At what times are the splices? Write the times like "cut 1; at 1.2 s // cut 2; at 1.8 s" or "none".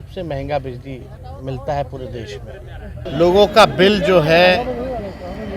cut 1; at 3.1 s